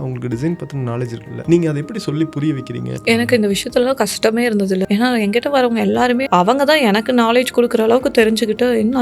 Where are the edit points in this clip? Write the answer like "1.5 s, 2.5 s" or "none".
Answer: 1.3 s, 2.9 s, 4.8 s, 6.2 s